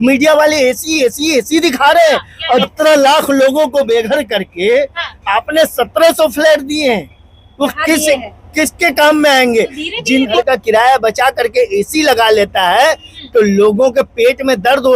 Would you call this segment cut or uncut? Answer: cut